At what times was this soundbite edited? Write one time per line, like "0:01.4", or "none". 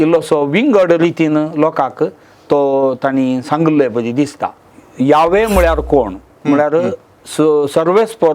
0:04.5